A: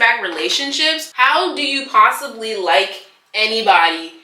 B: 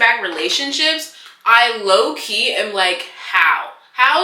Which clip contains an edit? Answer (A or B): A